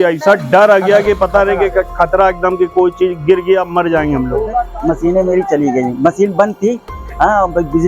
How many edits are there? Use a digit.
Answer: 1